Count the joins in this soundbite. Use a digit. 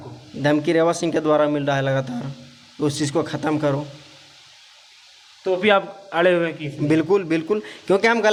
0